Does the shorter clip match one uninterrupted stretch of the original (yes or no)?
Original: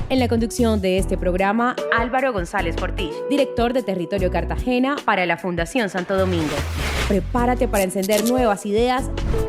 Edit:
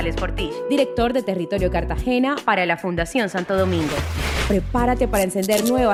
yes